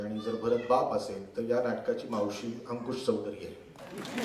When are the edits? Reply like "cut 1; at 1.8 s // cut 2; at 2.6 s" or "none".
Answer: none